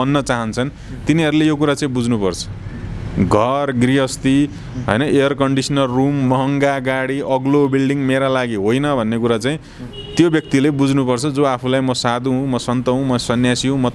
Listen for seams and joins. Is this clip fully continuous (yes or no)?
yes